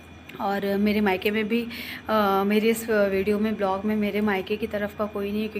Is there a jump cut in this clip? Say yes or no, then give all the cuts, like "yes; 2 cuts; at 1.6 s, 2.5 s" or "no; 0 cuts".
no; 0 cuts